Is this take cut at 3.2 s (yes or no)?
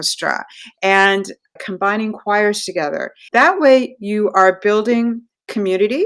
yes